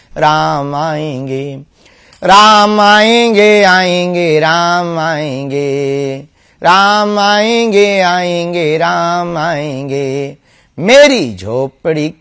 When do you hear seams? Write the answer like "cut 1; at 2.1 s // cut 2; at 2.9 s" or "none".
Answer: none